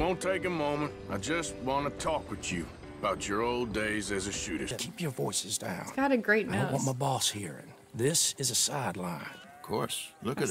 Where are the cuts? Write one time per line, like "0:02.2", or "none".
0:04.7